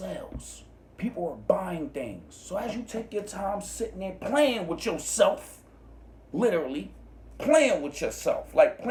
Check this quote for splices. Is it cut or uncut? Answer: uncut